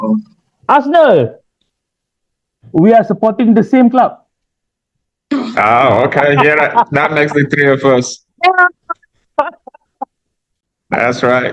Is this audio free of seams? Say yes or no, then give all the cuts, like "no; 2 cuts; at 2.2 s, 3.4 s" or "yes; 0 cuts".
yes; 0 cuts